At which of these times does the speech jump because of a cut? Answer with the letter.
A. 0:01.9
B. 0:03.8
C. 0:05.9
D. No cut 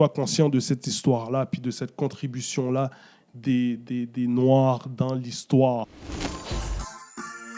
C